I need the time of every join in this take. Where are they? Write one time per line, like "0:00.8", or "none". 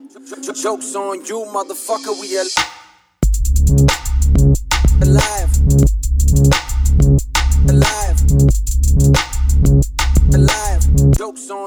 none